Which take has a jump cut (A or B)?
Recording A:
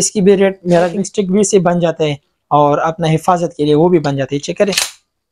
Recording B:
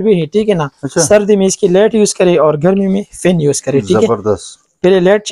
A